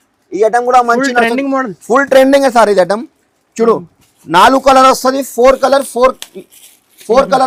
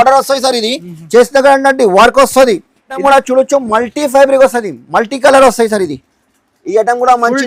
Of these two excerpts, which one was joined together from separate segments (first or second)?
second